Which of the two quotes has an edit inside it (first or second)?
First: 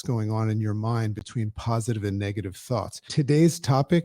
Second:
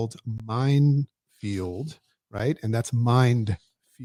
first